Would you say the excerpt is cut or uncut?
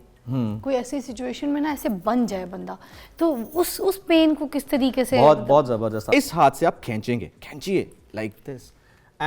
cut